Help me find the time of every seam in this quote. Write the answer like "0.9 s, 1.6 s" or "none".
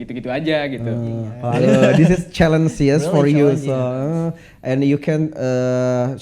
1.4 s